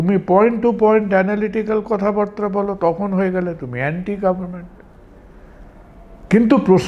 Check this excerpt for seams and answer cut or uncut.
uncut